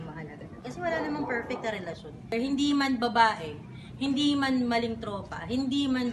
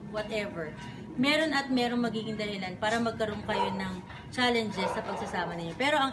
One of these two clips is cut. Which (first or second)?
first